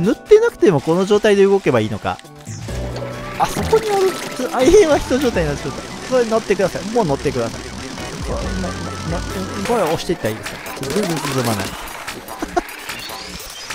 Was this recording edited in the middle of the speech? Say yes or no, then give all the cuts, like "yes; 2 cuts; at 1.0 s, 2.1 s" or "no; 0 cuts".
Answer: yes; 1 cut; at 9.6 s